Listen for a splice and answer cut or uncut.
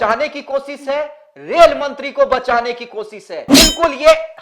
cut